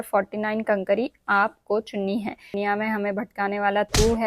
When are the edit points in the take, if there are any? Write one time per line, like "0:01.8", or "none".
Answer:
0:02.6

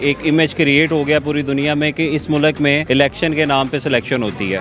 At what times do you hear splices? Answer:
0:02.8

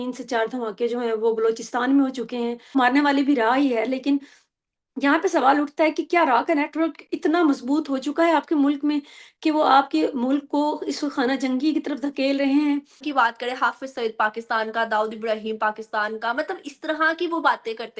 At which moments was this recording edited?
0:02.7
0:13.0

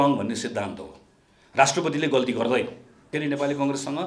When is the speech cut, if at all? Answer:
0:03.1

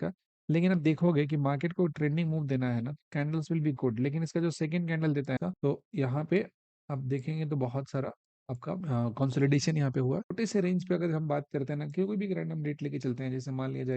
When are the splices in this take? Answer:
0:05.4
0:10.3

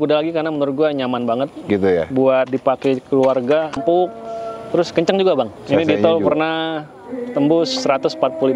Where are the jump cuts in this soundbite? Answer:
0:03.7
0:05.6

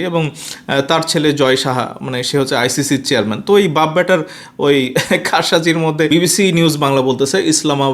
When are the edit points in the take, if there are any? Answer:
0:06.1

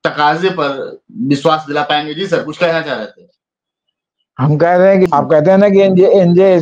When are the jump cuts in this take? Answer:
0:05.1

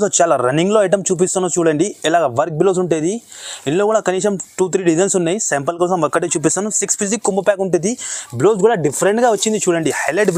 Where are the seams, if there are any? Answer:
none

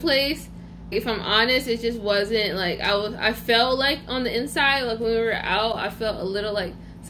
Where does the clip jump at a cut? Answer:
none

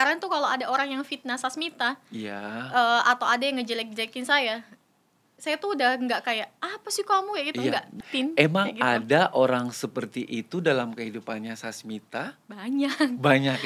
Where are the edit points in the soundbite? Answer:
0:08.0

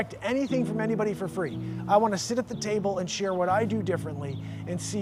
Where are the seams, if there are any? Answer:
none

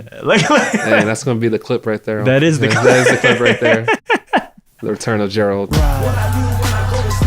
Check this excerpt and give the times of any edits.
0:05.7

